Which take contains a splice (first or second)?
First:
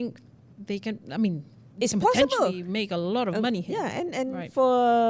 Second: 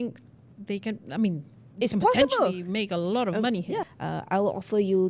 second